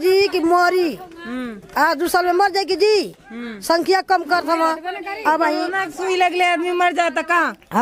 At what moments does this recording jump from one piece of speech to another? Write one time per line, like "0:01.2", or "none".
none